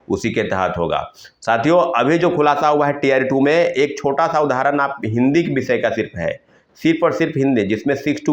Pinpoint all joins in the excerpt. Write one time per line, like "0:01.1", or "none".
none